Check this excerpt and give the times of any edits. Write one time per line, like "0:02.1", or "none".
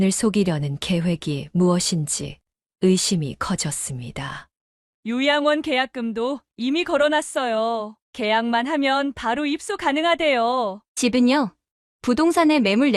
0:10.8